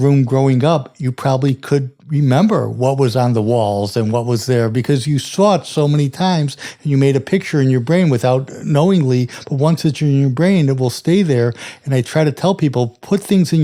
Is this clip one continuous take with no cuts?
yes; 0 cuts

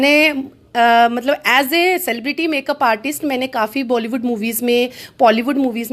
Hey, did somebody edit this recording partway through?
no; 0 cuts

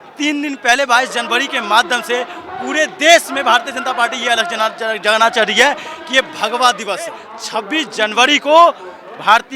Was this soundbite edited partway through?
yes; 1 cut; at 7.3 s

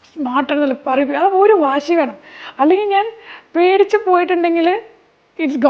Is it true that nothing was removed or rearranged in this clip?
yes; 0 cuts

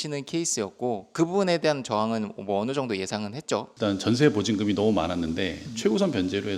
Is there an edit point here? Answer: yes; 1 cut; at 3.7 s

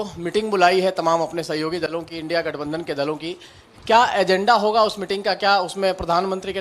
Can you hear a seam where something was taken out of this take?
no; 0 cuts

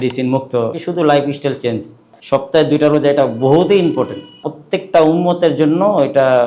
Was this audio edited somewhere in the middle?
yes; 3 cuts; at 0.8 s, 2.1 s, 4.5 s

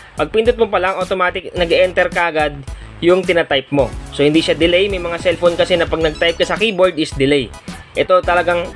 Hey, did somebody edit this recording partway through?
no; 0 cuts

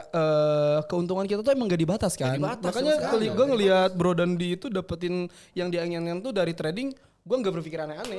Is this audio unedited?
yes; 0 cuts

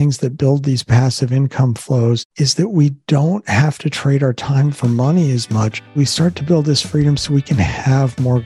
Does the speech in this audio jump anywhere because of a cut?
yes; 2 cuts; at 2.3 s, 6.0 s

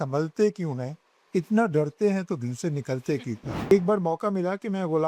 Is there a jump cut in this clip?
yes; 1 cut; at 3.7 s

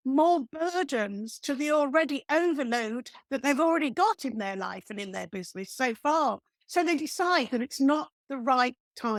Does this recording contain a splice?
no; 0 cuts

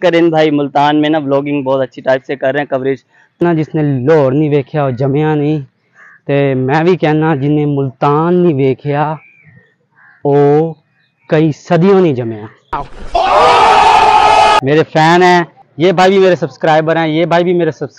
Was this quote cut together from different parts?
yes; 2 cuts; at 3.4 s, 14.6 s

